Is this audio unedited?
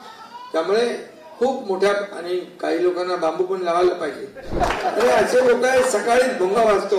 no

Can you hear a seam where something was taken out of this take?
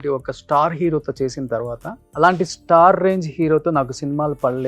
yes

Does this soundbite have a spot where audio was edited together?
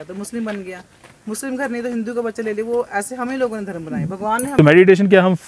yes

